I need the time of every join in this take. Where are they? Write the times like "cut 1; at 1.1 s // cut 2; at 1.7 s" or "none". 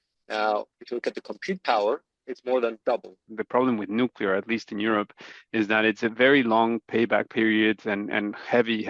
cut 1; at 3.3 s